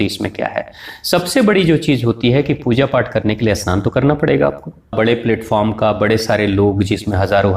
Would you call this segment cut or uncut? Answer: cut